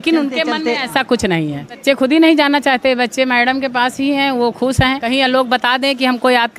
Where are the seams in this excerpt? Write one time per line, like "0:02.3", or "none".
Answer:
0:01.8
0:05.0